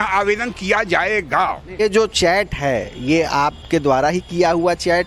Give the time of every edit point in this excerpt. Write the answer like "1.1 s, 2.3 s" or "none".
1.8 s